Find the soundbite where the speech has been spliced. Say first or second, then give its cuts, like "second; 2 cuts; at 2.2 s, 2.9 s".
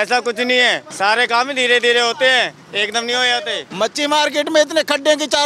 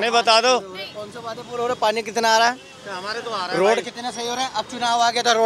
first; 2 cuts; at 0.9 s, 3.6 s